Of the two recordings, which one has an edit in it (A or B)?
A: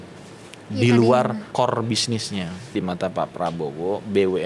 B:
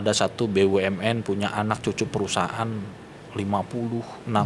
A